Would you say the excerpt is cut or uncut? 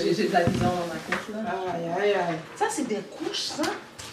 uncut